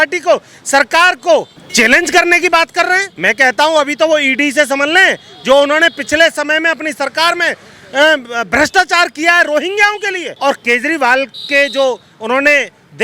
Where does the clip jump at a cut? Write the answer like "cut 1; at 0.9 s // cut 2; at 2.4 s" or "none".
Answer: cut 1; at 1.6 s // cut 2; at 3.1 s // cut 3; at 10.2 s